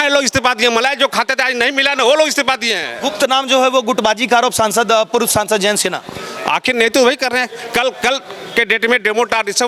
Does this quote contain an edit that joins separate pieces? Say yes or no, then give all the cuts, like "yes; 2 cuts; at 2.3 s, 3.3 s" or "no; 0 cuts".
no; 0 cuts